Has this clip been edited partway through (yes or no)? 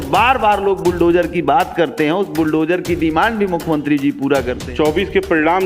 yes